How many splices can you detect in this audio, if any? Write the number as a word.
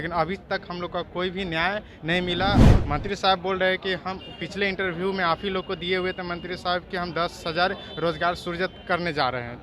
one